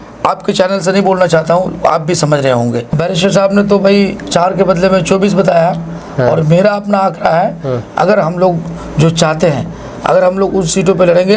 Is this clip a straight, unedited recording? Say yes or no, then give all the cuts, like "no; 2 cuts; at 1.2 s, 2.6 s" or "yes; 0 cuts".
no; 1 cut; at 2.9 s